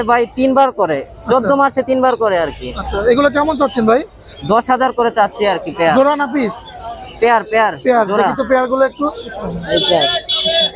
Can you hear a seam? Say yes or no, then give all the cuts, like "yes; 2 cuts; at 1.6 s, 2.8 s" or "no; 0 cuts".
no; 0 cuts